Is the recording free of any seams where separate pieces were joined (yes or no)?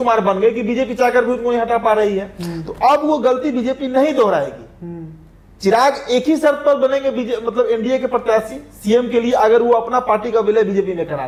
yes